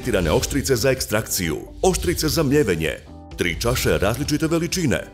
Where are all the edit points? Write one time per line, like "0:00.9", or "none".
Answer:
0:01.6